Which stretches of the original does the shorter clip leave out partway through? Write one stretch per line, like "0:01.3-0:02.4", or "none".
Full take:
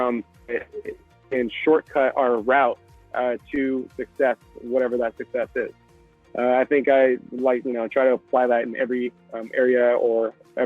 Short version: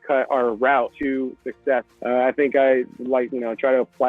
0:02.8-0:03.5
0:04.5-0:06.3